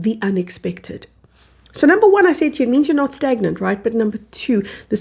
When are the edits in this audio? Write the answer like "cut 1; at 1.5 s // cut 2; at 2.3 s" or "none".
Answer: none

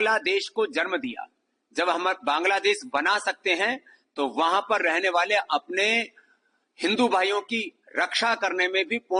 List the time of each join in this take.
none

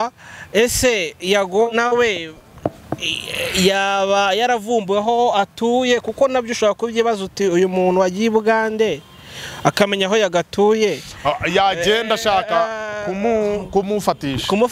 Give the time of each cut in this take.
none

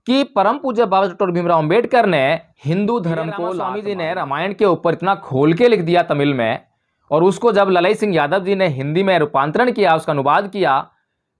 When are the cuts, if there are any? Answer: cut 1; at 3.7 s

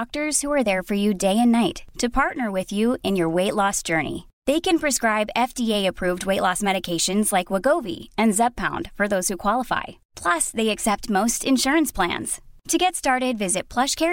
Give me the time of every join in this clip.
none

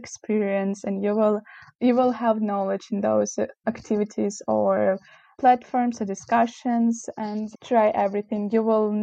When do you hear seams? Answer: cut 1; at 7.4 s

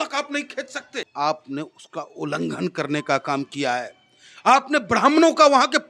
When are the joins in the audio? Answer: cut 1; at 1.1 s

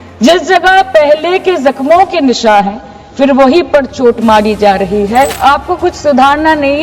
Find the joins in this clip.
cut 1; at 5.3 s

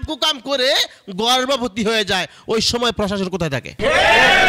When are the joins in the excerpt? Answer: none

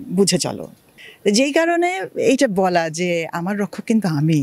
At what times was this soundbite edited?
cut 1; at 0.9 s

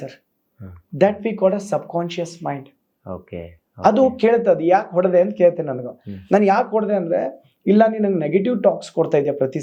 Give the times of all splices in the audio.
none

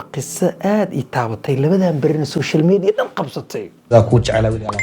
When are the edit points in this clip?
cut 1; at 3.9 s

